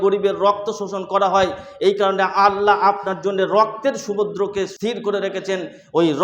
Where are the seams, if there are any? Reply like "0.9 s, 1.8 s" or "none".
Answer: 4.7 s